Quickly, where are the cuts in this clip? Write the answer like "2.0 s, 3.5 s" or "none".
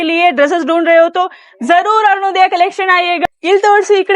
3.2 s

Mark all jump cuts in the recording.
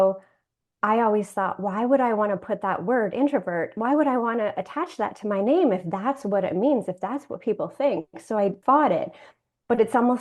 8.6 s

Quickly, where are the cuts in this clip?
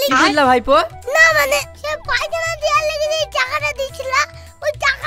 none

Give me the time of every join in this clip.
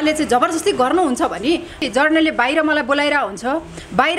1.8 s

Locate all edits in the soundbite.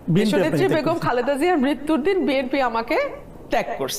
none

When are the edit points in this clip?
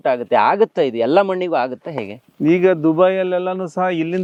none

